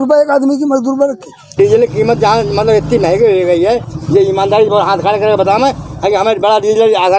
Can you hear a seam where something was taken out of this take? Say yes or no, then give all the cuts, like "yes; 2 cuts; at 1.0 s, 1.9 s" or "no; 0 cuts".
yes; 1 cut; at 1.6 s